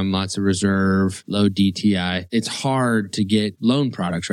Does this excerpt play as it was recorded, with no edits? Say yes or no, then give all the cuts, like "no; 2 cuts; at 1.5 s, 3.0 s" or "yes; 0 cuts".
no; 3 cuts; at 1.2 s, 2.2 s, 3.5 s